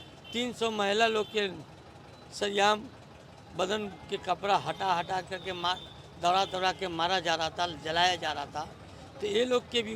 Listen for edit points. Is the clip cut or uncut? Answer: uncut